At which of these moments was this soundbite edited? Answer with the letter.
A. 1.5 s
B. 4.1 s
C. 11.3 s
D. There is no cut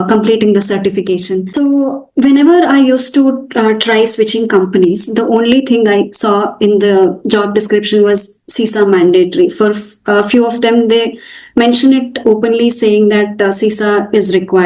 A